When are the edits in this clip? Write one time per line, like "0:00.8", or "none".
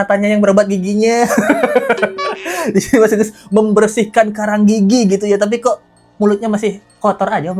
none